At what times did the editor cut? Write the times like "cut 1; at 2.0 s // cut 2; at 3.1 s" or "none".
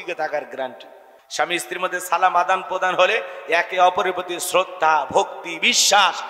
cut 1; at 1.2 s

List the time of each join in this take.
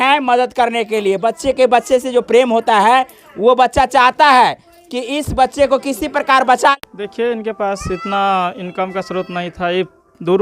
cut 1; at 6.7 s

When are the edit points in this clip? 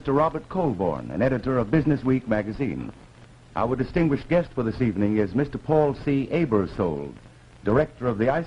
cut 1; at 7.6 s

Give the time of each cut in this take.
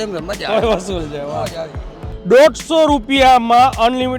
cut 1; at 2.1 s

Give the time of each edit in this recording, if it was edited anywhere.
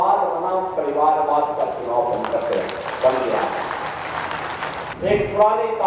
cut 1; at 4.8 s

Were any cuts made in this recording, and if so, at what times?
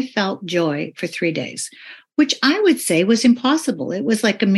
none

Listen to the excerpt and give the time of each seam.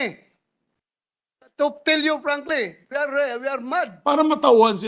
cut 1; at 3.9 s

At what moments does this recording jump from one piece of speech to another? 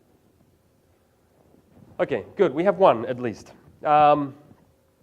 cut 1; at 2.3 s

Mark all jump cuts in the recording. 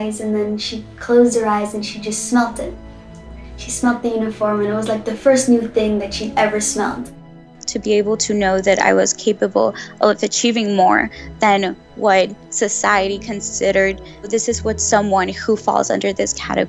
cut 1; at 7.6 s // cut 2; at 14.3 s

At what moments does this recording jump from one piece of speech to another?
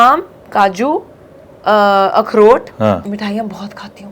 cut 1; at 3.1 s

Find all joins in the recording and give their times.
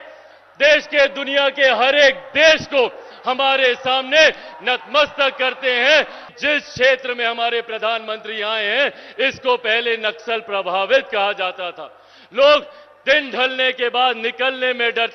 cut 1; at 6.2 s

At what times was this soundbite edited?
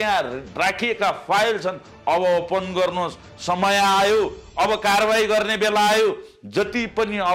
none

